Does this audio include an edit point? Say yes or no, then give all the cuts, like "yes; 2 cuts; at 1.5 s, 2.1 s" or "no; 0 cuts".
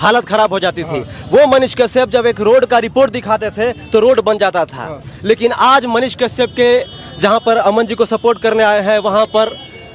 no; 0 cuts